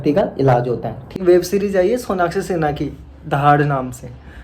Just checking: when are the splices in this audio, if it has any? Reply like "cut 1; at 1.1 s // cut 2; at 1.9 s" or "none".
cut 1; at 1.1 s